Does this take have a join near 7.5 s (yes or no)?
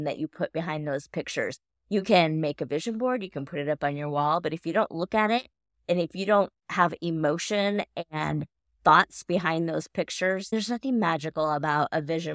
no